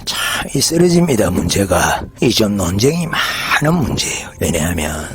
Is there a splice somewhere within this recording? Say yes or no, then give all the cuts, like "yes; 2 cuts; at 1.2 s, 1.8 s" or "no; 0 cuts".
yes; 1 cut; at 4.2 s